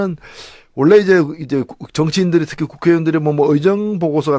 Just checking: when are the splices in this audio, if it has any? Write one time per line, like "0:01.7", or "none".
none